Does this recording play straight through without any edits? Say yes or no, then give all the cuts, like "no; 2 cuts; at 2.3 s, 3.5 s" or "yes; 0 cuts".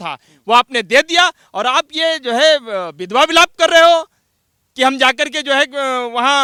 yes; 0 cuts